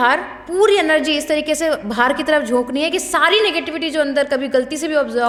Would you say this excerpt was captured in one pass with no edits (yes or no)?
yes